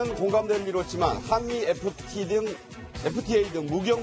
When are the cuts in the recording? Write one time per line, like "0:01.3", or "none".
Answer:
none